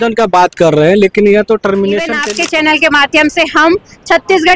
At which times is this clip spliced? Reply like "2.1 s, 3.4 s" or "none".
2.2 s